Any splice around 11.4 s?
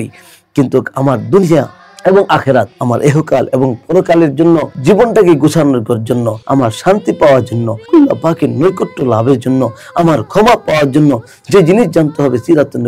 no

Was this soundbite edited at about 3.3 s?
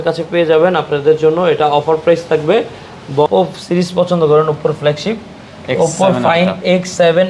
yes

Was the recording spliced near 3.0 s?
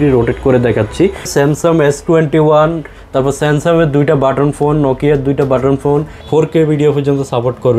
no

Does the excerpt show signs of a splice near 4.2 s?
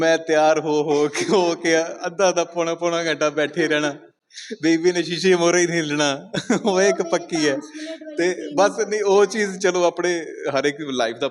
no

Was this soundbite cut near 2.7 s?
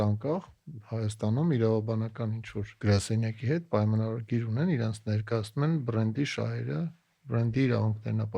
yes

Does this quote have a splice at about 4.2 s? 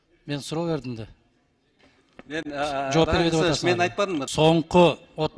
yes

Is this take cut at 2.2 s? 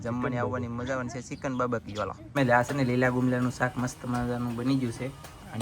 yes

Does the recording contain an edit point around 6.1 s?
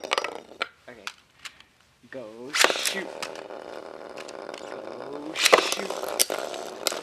no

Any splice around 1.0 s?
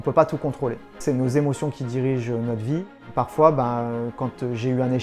yes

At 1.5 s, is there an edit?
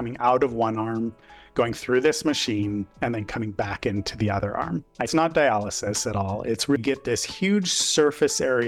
no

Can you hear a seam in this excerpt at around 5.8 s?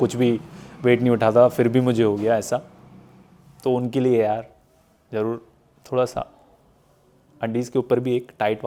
no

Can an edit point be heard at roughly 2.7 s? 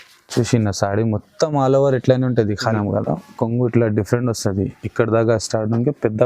yes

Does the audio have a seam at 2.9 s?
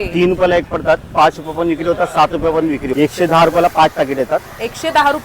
yes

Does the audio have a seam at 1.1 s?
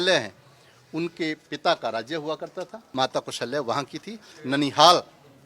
no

